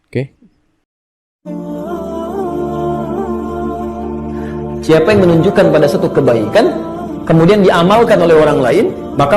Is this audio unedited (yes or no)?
no